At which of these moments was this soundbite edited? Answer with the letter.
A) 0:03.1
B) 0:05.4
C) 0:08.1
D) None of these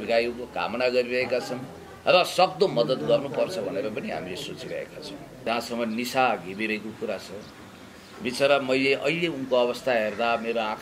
B